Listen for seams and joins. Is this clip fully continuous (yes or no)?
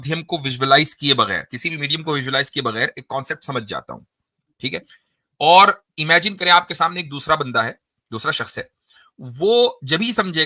yes